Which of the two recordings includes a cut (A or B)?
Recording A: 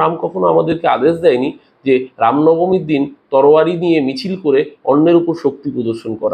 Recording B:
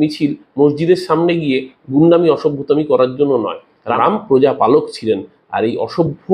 B